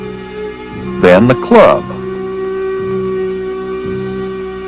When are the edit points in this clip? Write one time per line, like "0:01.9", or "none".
0:01.9